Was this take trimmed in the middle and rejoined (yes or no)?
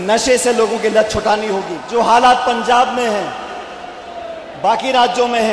yes